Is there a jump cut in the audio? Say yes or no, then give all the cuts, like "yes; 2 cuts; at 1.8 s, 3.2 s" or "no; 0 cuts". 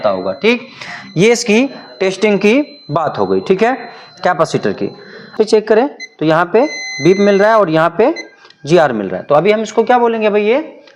yes; 1 cut; at 5.3 s